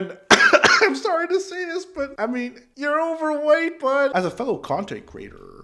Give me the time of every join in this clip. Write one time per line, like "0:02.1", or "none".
0:04.1